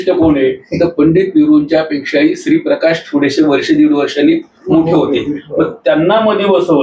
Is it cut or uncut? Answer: uncut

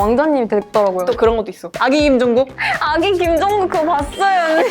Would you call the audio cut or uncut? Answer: cut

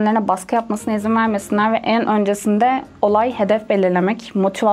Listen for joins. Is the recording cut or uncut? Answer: uncut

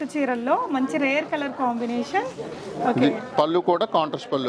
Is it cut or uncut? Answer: uncut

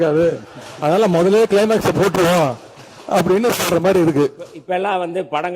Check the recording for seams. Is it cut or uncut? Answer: cut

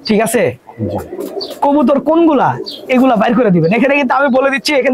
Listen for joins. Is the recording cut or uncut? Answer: uncut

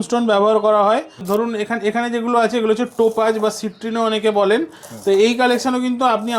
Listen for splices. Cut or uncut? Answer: cut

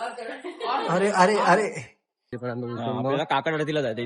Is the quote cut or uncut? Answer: cut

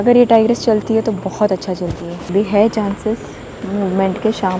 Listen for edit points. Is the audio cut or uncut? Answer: cut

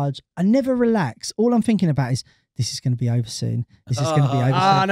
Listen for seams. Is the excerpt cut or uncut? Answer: uncut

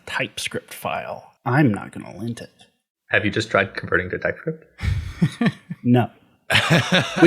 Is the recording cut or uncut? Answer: cut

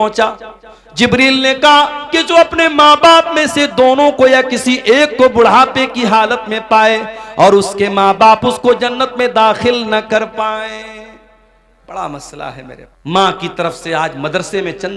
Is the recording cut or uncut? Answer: cut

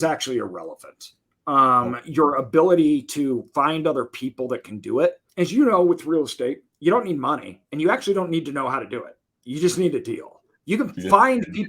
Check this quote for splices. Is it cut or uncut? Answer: cut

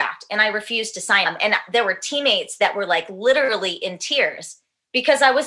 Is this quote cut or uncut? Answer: cut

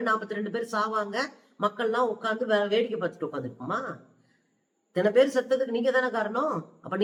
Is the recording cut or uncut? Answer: uncut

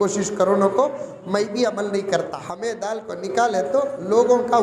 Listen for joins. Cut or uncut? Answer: cut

